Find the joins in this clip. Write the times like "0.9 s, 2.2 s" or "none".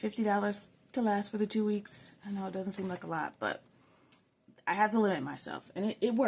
none